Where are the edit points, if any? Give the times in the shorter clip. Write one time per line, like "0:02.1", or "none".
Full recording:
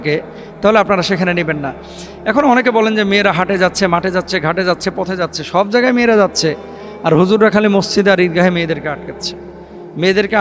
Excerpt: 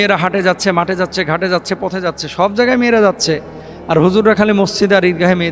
none